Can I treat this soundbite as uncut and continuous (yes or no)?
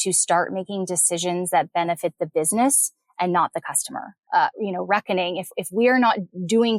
no